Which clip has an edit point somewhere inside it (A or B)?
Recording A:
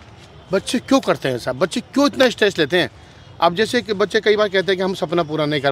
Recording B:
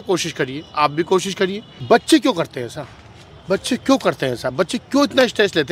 B